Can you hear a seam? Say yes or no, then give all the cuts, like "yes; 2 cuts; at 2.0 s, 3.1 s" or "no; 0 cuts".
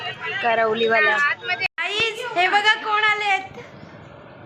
yes; 1 cut; at 1.6 s